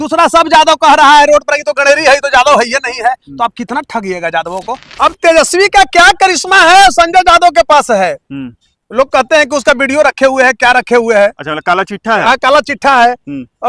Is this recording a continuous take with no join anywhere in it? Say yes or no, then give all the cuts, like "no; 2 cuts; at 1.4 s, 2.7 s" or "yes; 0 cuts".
no; 1 cut; at 4.9 s